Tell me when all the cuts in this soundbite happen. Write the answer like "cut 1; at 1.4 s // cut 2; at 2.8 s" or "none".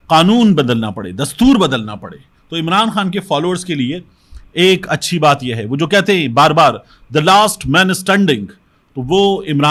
none

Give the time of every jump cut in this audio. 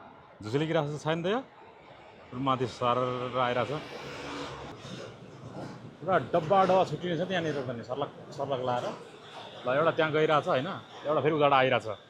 cut 1; at 4.7 s

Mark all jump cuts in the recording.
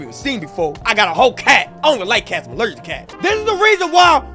cut 1; at 3.1 s

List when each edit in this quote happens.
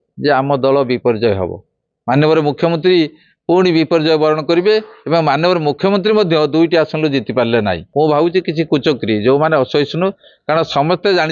cut 1; at 7.8 s

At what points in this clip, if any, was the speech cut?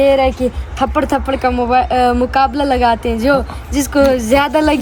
none

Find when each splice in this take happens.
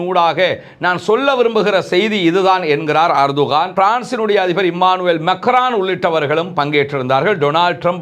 cut 1; at 3.7 s

